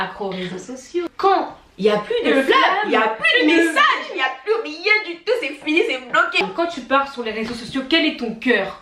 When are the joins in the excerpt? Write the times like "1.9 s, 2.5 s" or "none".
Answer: 1.1 s, 6.4 s